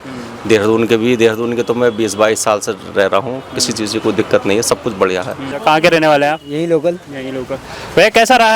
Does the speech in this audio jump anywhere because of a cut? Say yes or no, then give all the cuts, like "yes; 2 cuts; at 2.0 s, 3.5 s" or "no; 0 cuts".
yes; 1 cut; at 5.5 s